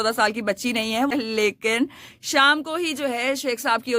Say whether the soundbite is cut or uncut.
cut